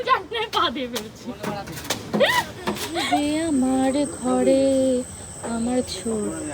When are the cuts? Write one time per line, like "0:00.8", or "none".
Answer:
0:02.9